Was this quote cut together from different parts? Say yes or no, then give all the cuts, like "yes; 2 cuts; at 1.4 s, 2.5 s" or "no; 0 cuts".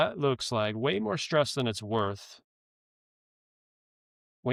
no; 0 cuts